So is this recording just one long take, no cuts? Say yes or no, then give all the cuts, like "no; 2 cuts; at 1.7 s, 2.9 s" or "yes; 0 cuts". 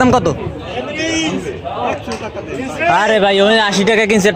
yes; 0 cuts